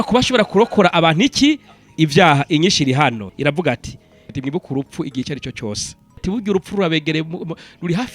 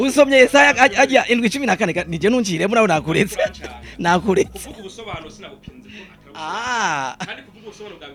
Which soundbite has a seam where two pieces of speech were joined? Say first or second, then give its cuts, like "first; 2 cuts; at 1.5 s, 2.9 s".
first; 3 cuts; at 3.3 s, 4.2 s, 6.2 s